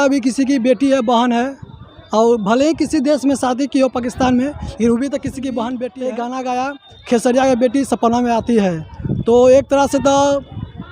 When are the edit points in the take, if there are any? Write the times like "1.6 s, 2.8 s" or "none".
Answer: 5.9 s